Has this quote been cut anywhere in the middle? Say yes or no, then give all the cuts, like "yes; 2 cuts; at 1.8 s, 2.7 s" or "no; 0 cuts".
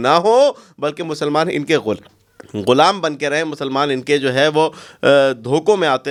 no; 0 cuts